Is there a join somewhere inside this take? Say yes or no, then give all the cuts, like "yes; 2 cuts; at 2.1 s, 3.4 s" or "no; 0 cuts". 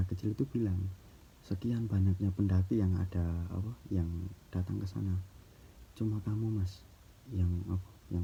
no; 0 cuts